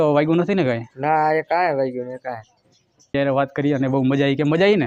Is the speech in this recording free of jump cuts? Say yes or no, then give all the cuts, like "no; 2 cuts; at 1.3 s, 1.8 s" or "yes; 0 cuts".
no; 1 cut; at 3.2 s